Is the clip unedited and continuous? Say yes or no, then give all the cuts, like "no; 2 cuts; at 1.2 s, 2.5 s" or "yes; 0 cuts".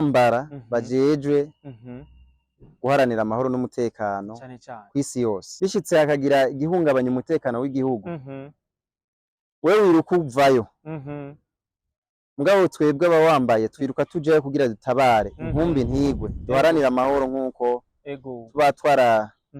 no; 1 cut; at 5.5 s